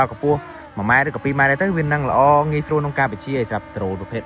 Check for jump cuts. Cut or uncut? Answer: uncut